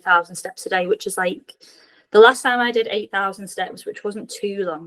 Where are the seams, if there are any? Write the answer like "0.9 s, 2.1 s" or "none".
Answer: none